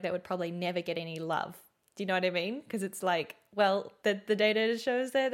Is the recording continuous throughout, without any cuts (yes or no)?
no